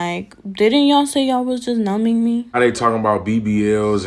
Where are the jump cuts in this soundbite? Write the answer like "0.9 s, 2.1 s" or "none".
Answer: 2.6 s